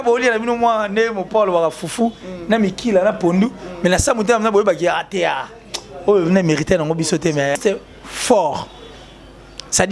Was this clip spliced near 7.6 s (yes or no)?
yes